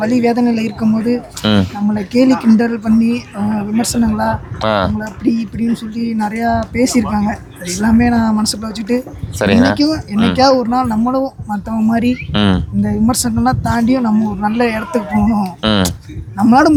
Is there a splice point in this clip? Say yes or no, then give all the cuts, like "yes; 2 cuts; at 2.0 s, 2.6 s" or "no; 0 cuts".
no; 0 cuts